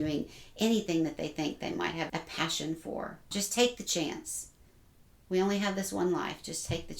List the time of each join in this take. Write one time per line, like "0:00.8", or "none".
0:02.1
0:03.3